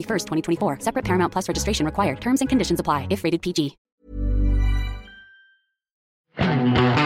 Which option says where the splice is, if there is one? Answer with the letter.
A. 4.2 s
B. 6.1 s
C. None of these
B